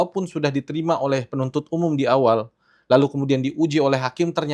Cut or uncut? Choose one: uncut